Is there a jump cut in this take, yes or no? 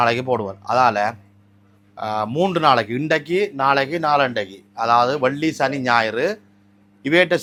no